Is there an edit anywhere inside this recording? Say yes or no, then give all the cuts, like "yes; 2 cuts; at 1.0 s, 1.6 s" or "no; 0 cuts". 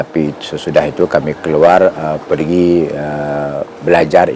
no; 0 cuts